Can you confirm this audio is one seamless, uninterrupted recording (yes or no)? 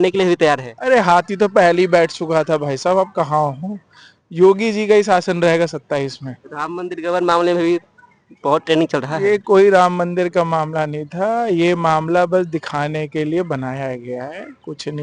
yes